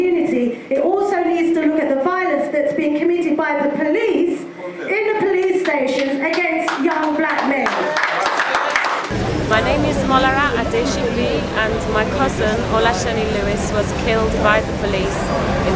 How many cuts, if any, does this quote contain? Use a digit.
1